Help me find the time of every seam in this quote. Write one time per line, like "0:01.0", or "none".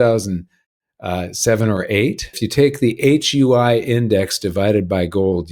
0:02.4